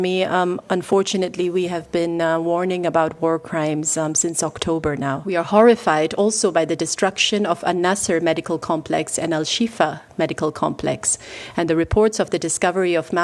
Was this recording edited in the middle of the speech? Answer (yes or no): yes